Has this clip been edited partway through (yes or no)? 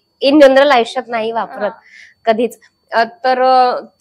no